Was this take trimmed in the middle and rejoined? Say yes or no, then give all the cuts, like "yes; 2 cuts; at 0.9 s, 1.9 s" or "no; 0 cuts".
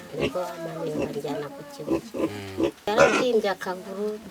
yes; 1 cut; at 2.9 s